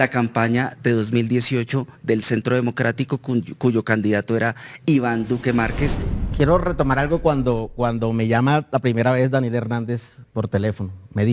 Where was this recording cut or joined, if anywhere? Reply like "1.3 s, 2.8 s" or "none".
6.1 s